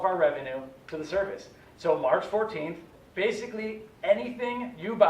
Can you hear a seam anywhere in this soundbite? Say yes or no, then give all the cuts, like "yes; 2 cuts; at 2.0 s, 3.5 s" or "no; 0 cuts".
yes; 1 cut; at 2.9 s